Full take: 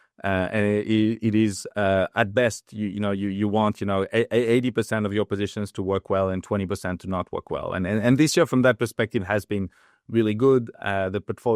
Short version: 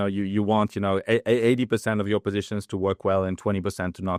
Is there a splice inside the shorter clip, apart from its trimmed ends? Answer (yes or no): no